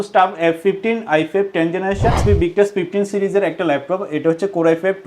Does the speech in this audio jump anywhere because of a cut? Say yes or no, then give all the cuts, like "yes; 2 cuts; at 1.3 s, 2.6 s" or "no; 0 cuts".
yes; 1 cut; at 2.2 s